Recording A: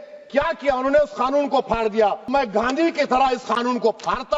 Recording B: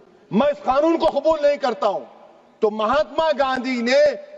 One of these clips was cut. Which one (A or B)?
A